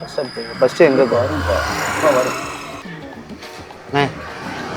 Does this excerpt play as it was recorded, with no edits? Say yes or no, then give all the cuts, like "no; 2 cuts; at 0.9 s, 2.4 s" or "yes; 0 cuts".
yes; 0 cuts